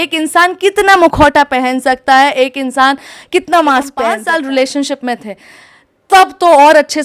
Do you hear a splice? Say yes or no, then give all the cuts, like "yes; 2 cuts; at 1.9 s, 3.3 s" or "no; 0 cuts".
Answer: yes; 1 cut; at 4.2 s